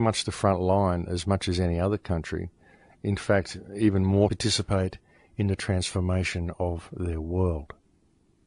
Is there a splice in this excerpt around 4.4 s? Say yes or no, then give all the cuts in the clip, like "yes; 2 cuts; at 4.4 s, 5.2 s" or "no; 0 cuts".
no; 0 cuts